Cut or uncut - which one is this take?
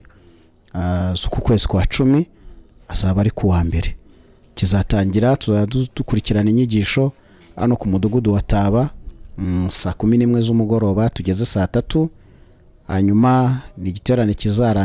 uncut